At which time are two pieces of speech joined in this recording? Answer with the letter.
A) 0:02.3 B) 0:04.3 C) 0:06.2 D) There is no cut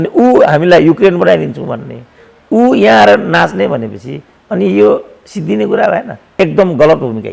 D